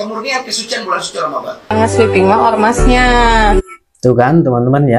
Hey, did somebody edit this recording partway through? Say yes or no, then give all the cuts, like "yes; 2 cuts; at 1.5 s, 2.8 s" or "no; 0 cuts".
yes; 1 cut; at 1.7 s